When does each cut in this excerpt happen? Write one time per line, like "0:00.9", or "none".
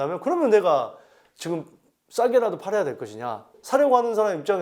0:03.6